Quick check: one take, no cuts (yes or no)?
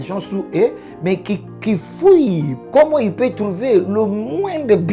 no